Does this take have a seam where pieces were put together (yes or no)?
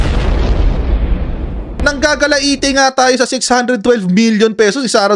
yes